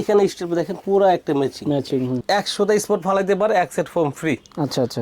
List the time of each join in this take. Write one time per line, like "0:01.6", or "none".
0:02.2